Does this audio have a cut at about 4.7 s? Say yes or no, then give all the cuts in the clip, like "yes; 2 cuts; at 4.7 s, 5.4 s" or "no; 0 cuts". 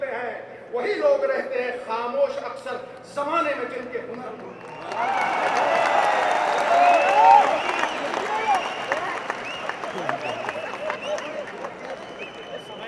no; 0 cuts